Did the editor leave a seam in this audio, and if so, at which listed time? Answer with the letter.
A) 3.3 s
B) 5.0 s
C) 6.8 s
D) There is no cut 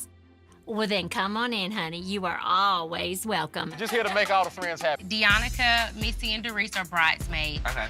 B